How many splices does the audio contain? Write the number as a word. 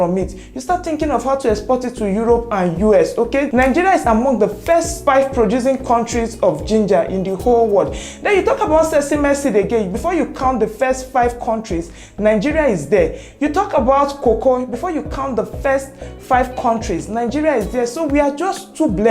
two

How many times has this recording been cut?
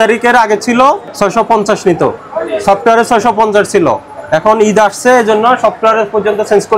one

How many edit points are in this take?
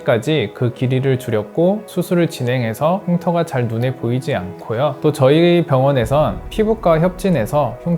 two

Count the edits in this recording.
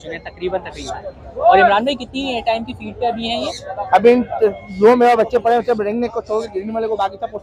zero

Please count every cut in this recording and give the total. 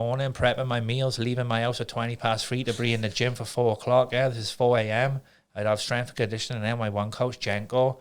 zero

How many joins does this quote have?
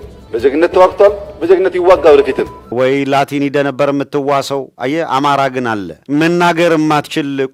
zero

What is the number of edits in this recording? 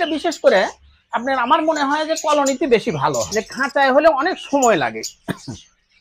one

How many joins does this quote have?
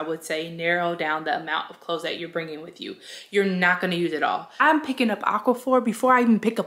one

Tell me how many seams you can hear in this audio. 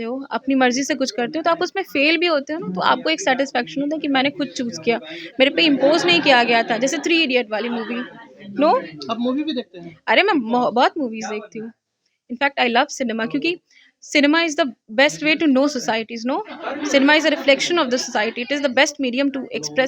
zero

